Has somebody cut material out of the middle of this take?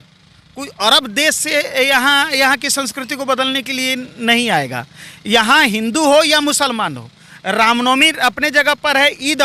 no; 0 cuts

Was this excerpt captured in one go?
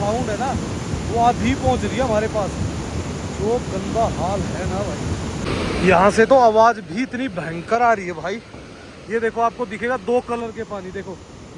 no; 1 cut; at 5.4 s

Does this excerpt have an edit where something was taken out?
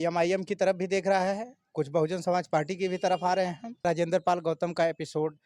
yes; 1 cut; at 3.8 s

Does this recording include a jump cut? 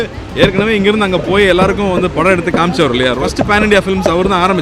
yes; 1 cut; at 3.2 s

